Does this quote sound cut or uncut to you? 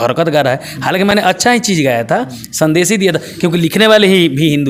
uncut